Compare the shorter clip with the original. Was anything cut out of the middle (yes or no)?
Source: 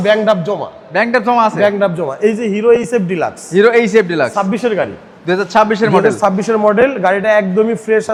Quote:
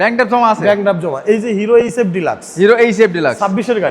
no